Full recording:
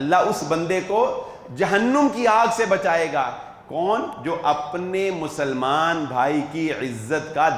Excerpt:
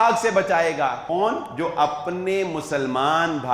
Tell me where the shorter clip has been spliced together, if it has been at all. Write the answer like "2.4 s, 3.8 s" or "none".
1.0 s